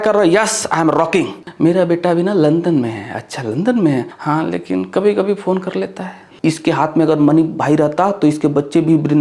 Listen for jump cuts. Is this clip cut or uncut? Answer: cut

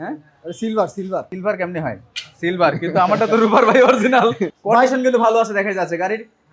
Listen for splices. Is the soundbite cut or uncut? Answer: cut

